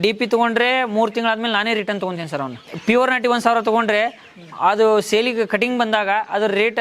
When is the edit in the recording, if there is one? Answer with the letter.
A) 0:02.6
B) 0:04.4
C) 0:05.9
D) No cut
A